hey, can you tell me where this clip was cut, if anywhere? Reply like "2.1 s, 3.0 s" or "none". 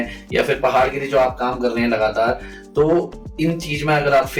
none